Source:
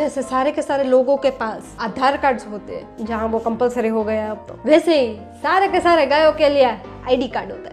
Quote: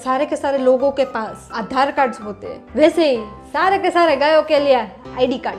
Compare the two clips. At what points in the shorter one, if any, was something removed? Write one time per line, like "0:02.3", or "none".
0:02.6